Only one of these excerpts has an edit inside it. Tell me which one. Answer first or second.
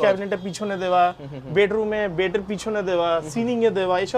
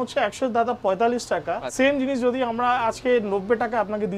second